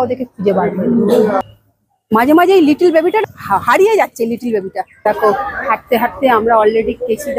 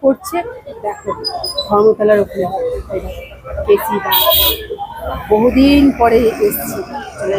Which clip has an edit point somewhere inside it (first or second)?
first